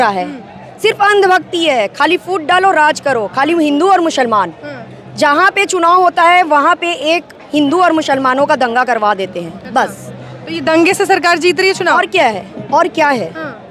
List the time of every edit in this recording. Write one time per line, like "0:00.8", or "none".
none

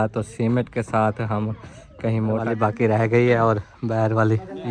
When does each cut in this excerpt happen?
0:02.4

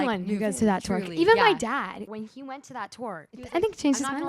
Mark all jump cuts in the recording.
0:02.1
0:03.4

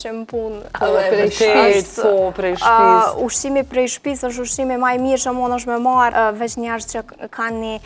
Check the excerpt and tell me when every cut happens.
0:06.1

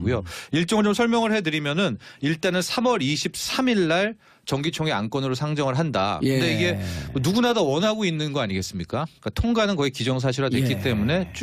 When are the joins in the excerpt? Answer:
0:02.1

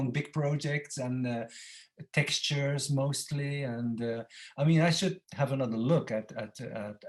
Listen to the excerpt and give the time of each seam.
none

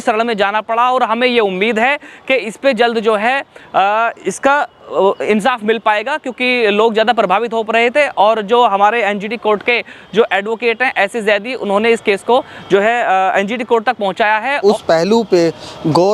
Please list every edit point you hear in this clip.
0:14.6

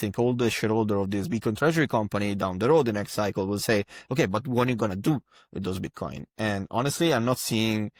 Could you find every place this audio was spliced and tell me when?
none

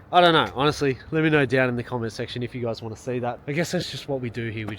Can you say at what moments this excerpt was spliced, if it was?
0:03.4

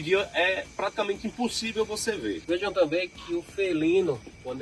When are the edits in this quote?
0:02.4

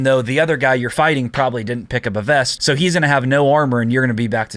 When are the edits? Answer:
0:02.5

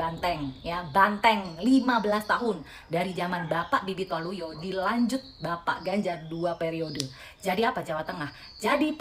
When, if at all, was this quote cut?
none

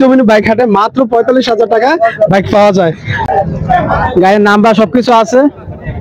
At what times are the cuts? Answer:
0:03.2

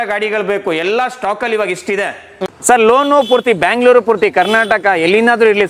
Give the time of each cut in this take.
0:02.5

